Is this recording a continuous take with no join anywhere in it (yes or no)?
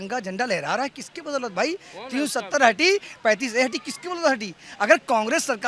yes